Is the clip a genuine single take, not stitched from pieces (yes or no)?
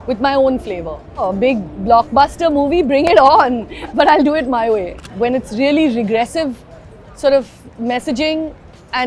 no